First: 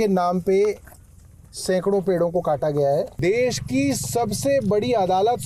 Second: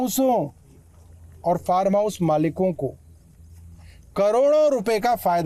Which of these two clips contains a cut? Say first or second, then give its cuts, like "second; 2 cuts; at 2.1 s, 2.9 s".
first; 1 cut; at 3.1 s